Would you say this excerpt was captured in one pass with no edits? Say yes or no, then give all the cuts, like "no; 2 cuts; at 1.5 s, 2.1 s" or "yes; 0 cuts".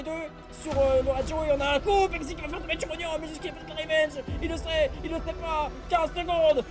yes; 0 cuts